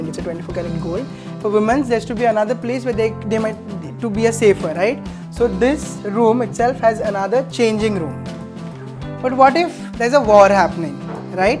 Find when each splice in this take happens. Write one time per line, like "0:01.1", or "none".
0:01.2